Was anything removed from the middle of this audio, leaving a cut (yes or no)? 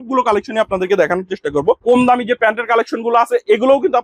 yes